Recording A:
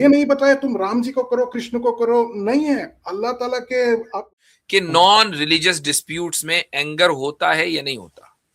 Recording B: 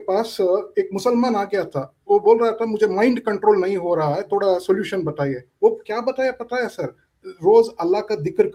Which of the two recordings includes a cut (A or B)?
A